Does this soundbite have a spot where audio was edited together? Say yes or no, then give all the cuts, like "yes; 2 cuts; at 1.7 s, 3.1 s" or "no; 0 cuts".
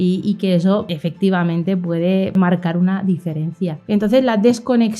yes; 3 cuts; at 1.0 s, 2.4 s, 3.8 s